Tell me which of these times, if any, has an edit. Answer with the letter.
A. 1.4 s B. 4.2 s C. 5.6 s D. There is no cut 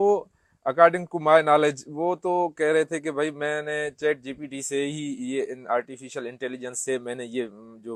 D